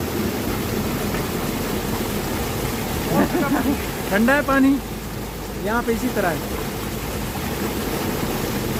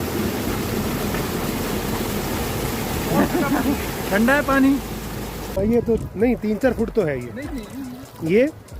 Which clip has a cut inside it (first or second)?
second